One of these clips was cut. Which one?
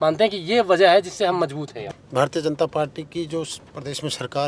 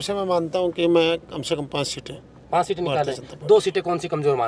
first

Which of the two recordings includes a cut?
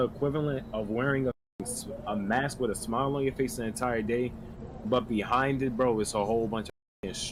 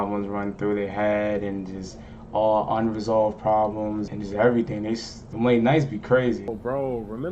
second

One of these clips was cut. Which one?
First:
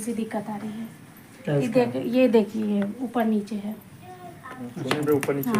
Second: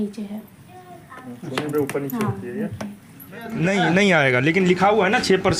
second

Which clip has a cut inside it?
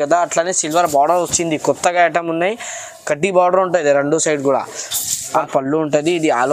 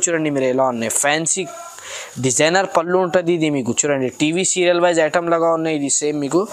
first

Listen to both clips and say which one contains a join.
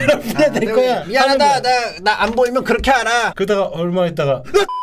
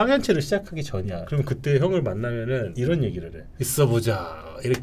first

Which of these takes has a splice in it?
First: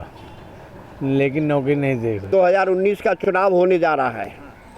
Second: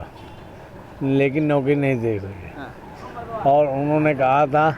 first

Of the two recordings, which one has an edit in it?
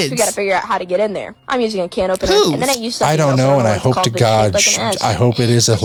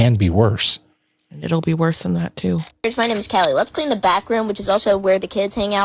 second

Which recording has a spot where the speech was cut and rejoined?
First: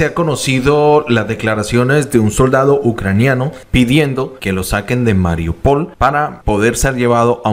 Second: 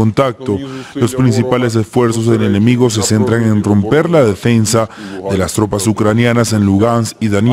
first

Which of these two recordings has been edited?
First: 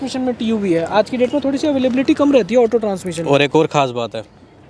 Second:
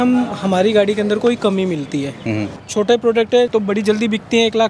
second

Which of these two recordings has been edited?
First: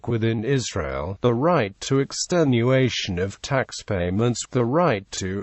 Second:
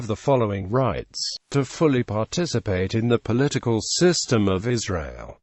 second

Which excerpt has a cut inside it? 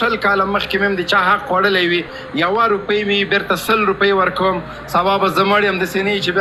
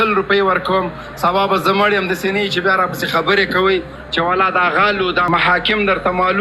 second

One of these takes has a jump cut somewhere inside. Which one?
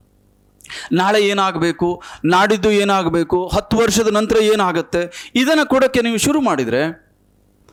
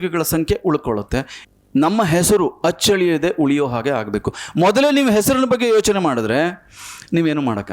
second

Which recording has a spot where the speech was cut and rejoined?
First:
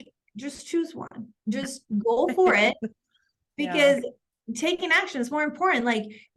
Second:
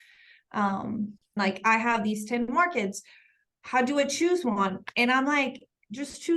second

